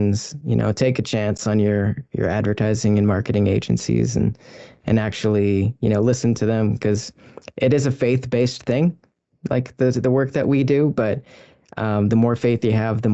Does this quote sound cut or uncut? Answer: uncut